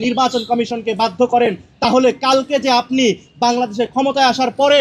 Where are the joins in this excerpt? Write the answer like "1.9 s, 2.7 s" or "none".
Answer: none